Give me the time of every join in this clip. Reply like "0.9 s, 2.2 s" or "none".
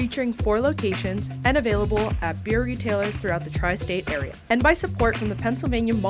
4.3 s